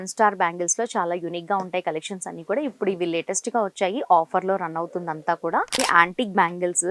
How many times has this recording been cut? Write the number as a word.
one